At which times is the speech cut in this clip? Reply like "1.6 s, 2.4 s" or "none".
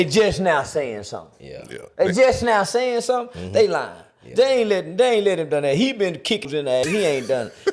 6.7 s